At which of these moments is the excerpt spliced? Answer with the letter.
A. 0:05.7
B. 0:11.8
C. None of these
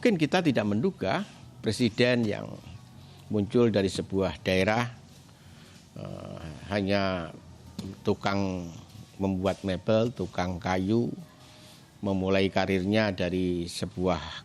C